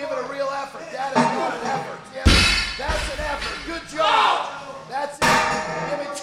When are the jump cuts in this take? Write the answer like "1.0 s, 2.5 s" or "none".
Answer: 2.1 s